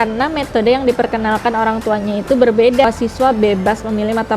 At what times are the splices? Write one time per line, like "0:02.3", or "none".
0:02.8